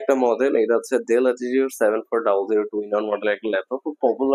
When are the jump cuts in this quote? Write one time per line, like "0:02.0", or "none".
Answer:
none